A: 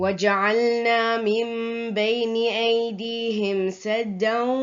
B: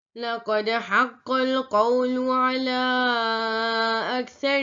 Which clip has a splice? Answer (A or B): A